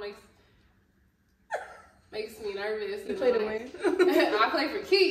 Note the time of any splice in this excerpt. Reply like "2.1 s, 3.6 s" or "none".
none